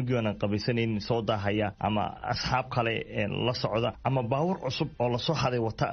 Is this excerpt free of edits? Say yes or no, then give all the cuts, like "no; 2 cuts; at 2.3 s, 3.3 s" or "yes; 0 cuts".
no; 3 cuts; at 1.9 s, 4.0 s, 4.9 s